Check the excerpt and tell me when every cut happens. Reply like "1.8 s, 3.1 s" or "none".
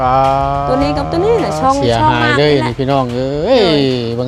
none